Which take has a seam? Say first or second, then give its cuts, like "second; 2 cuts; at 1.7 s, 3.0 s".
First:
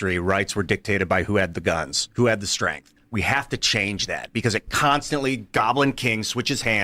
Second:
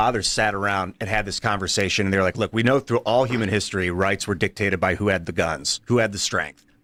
first; 1 cut; at 4.7 s